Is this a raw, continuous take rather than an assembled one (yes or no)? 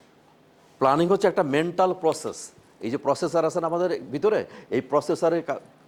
yes